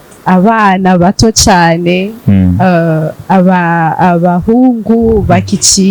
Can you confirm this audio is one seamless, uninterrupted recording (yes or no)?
yes